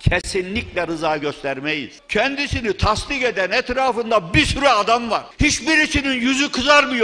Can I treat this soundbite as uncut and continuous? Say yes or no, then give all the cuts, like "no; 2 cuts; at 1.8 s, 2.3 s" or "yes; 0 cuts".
no; 2 cuts; at 1.9 s, 5.3 s